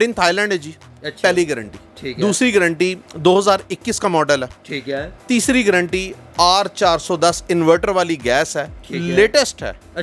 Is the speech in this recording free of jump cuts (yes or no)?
yes